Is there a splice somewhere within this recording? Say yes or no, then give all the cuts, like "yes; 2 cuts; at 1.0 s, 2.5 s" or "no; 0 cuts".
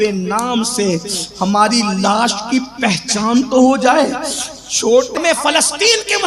yes; 1 cut; at 5.2 s